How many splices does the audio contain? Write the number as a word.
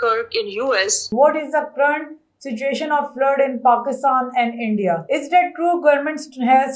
two